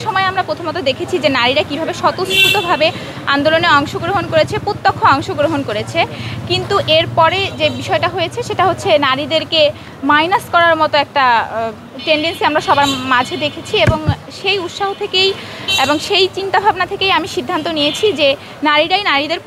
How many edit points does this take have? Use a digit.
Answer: 0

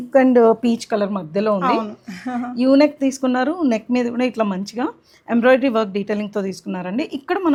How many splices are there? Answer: 0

